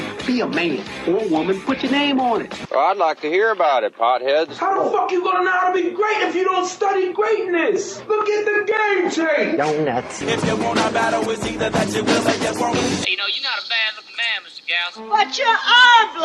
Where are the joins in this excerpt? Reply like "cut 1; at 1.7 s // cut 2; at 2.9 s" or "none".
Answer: cut 1; at 12.7 s